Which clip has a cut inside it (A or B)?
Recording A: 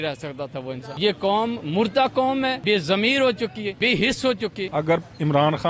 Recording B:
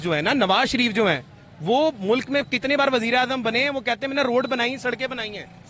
A